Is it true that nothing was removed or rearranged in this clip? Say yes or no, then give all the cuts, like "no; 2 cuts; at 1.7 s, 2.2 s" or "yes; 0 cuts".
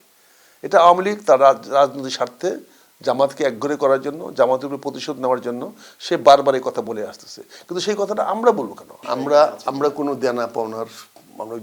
no; 1 cut; at 9.1 s